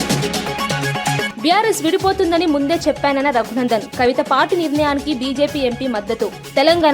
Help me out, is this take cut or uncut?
cut